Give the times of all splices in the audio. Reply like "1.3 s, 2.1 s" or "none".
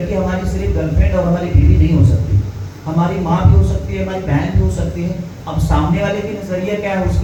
none